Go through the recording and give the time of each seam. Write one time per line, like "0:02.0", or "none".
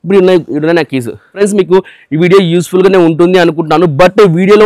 0:01.4